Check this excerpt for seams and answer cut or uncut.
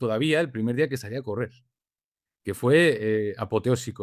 uncut